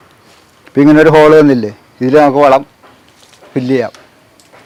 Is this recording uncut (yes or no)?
yes